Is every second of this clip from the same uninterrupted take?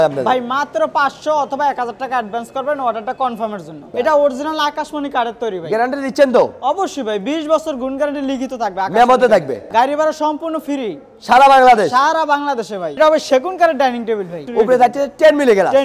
no; 4 cuts; at 3.9 s, 9.6 s, 13.0 s, 14.4 s

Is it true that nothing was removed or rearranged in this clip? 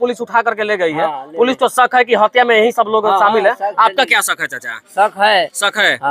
yes; 0 cuts

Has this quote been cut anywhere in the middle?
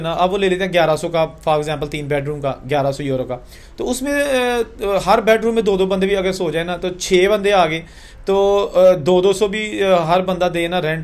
no; 0 cuts

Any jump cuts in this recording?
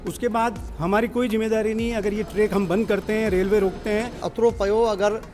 yes; 1 cut; at 4.3 s

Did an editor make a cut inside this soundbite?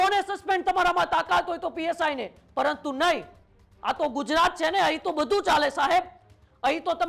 no; 0 cuts

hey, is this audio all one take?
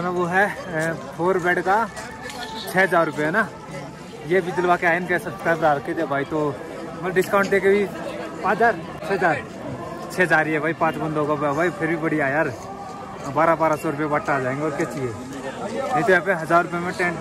yes; 0 cuts

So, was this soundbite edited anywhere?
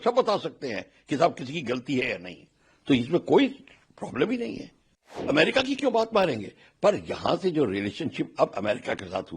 yes; 1 cut; at 5.3 s

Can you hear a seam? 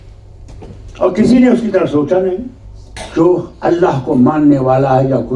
yes; 1 cut; at 3.0 s

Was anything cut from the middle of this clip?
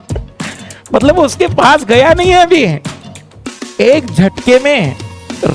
no; 0 cuts

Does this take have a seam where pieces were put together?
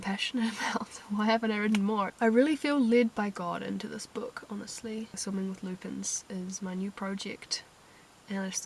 yes; 2 cuts; at 2.1 s, 5.2 s

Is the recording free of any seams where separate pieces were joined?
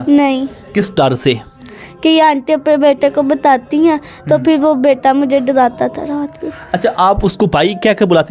yes; 0 cuts

